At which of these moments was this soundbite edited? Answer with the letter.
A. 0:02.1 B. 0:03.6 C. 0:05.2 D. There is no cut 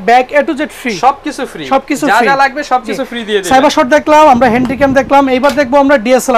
D